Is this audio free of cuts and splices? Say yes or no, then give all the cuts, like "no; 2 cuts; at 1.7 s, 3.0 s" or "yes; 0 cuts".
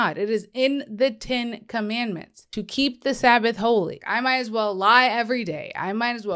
no; 2 cuts; at 2.4 s, 4.0 s